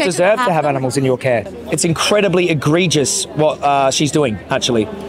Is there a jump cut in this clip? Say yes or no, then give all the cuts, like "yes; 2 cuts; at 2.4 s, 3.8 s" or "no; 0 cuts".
yes; 1 cut; at 1.5 s